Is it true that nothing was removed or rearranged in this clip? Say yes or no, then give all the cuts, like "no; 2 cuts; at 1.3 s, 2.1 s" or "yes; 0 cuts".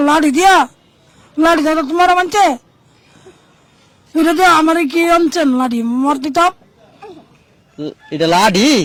yes; 0 cuts